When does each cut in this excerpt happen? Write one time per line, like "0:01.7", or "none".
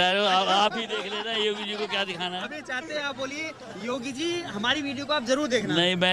none